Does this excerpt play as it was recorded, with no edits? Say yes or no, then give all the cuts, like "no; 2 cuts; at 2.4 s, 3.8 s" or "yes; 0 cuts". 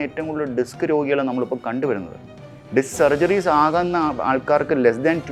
yes; 0 cuts